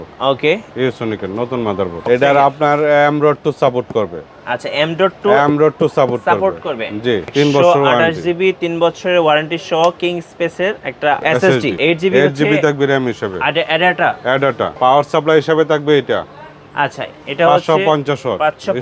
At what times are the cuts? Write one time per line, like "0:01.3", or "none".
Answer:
0:02.0
0:07.3
0:11.8
0:14.7

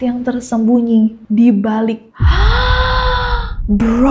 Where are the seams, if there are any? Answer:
0:02.1

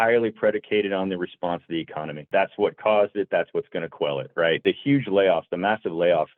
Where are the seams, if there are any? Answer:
0:02.2
0:04.6

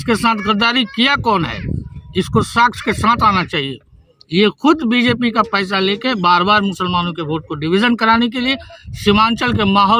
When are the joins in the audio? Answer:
none

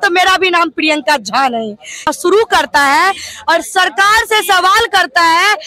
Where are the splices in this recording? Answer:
0:02.1

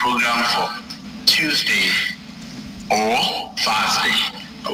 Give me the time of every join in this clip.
none

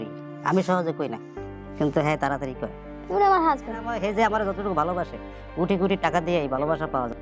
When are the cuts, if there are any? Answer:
0:04.0

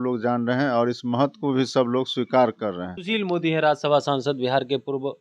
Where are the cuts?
0:02.9

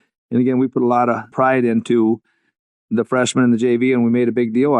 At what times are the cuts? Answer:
0:01.3

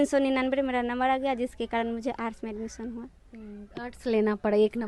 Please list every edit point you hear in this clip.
none

